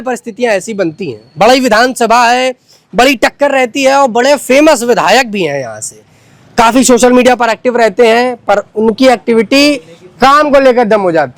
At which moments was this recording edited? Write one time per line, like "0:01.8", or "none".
none